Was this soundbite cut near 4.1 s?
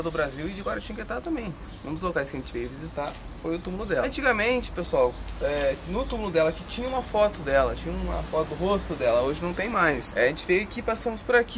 yes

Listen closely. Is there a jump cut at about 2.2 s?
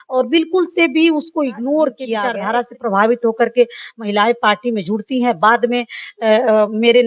yes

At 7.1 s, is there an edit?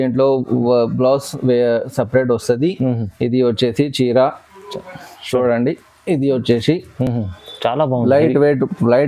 no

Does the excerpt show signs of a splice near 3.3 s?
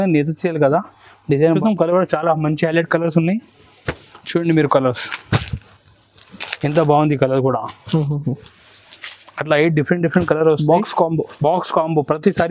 no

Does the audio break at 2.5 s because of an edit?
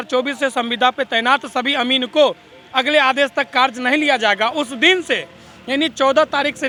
no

